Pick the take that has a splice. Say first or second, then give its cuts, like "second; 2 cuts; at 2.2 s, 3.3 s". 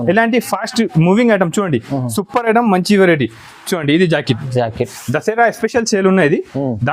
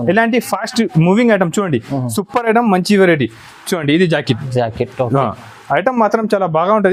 first; 1 cut; at 4.9 s